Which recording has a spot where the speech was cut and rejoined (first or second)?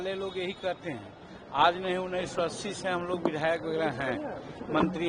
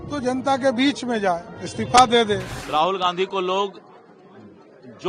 second